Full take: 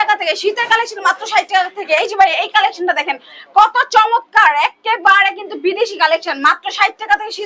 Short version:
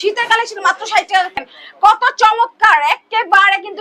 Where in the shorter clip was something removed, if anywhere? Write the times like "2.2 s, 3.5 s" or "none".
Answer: 1.4 s

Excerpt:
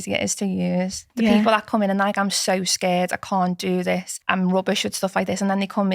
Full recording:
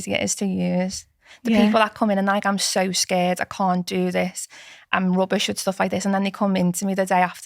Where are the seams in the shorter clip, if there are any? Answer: 1.0 s, 4.1 s

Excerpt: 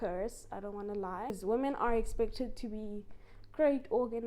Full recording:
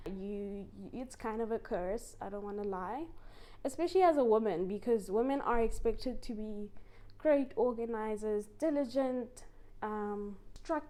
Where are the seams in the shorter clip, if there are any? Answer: 1.4 s

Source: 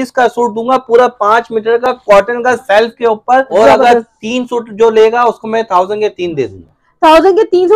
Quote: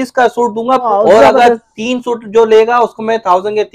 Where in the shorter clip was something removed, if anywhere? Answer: 0.9 s

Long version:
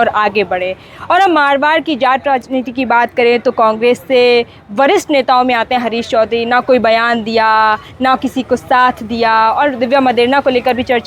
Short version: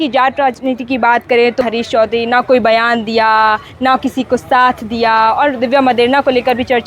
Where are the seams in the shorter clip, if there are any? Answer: 1.6 s

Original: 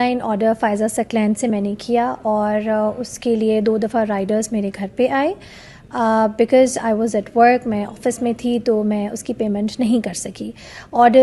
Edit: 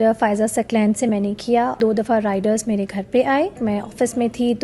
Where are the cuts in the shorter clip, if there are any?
1.8 s, 3.6 s

